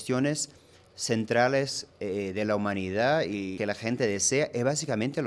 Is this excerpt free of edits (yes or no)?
no